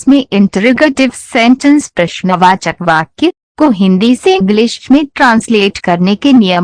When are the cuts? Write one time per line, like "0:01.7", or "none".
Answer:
0:00.9
0:02.7